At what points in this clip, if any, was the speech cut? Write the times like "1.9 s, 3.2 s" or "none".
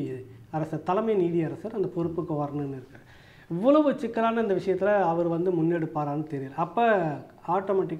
none

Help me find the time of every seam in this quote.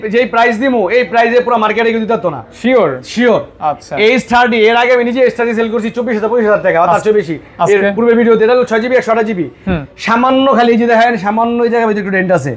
none

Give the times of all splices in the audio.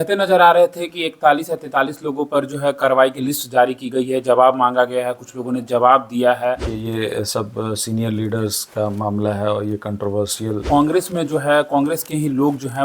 6.7 s, 10.6 s

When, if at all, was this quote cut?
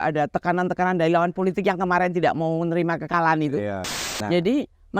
4.1 s

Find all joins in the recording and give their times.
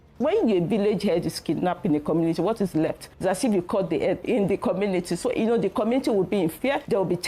4.2 s

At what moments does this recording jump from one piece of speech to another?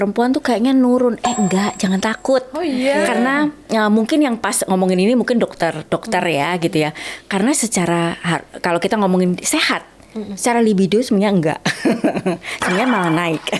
none

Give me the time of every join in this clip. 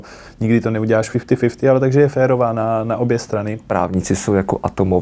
3.6 s

